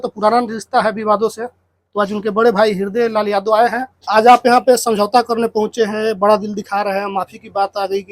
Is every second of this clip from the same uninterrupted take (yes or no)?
no